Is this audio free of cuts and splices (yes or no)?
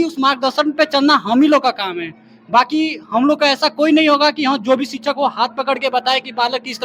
yes